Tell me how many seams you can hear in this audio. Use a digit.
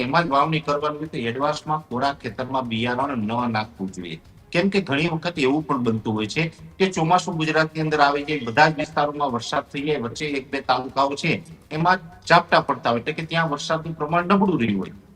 0